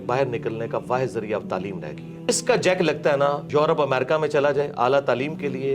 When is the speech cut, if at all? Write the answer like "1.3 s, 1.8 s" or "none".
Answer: 2.3 s, 3.4 s